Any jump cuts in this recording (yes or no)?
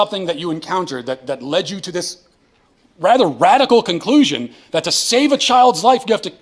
no